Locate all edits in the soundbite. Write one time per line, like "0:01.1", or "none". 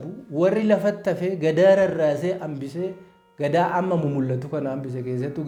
none